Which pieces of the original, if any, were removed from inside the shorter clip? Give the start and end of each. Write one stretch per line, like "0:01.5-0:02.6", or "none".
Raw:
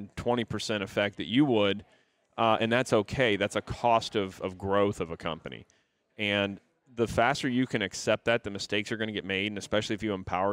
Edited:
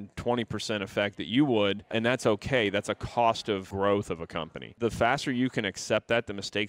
0:01.9-0:02.6
0:04.3-0:04.6
0:05.5-0:06.8